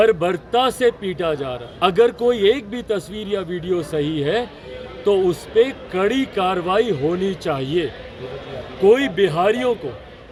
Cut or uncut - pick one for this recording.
uncut